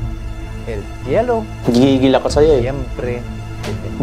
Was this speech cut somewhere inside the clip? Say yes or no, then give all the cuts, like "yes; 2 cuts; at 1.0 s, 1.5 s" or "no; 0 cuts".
no; 0 cuts